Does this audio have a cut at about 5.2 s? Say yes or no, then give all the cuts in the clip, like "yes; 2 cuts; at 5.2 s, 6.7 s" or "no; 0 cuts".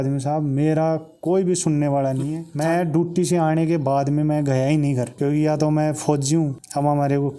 yes; 2 cuts; at 2.5 s, 5.2 s